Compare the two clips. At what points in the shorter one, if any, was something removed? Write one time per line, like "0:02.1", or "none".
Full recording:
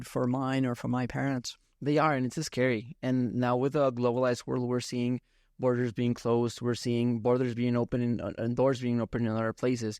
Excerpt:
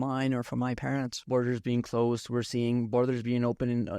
0:01.2